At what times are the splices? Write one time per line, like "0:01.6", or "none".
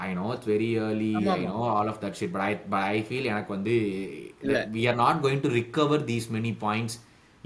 none